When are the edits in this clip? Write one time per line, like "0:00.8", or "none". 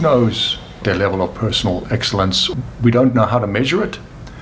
0:00.8
0:02.5